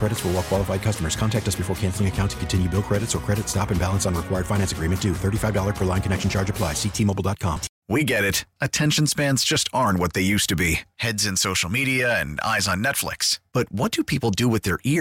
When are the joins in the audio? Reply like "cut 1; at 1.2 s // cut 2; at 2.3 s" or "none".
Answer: cut 1; at 7.7 s